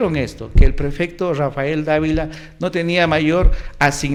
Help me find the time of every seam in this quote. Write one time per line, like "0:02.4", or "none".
none